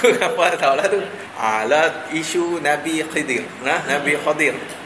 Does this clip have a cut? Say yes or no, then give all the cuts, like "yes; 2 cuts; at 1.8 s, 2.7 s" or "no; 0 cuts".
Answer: yes; 1 cut; at 1.2 s